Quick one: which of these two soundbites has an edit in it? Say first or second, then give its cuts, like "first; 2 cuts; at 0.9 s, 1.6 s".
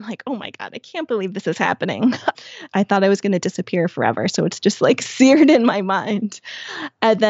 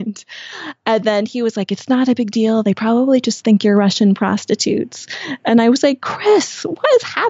first; 1 cut; at 2.4 s